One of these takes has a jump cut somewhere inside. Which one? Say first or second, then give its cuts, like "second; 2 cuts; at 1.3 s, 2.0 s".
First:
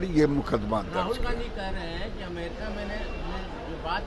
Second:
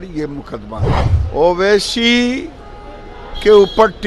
second; 1 cut; at 1.0 s